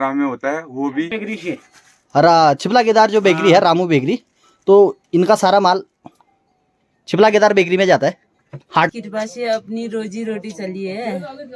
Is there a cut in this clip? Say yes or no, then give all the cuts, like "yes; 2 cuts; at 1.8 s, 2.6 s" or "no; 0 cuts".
yes; 2 cuts; at 1.2 s, 8.9 s